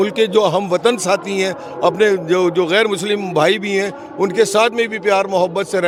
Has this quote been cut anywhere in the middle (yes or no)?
no